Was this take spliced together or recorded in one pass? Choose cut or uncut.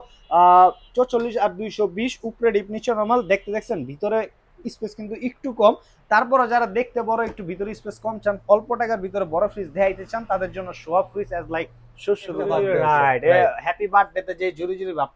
cut